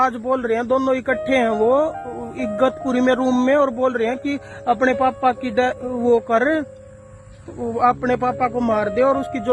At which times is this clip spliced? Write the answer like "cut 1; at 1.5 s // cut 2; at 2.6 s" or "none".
none